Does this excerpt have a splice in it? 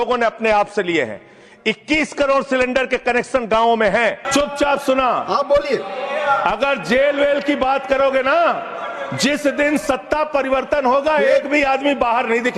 yes; 1 cut; at 4.2 s

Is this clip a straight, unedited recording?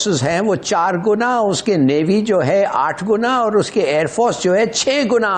yes; 0 cuts

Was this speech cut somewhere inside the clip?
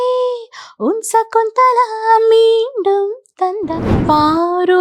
yes; 1 cut; at 3.9 s

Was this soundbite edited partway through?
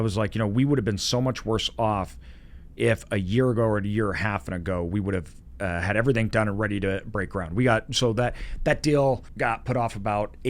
yes; 1 cut; at 9.3 s

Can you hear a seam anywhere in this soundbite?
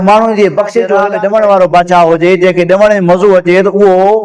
yes; 1 cut; at 1.0 s

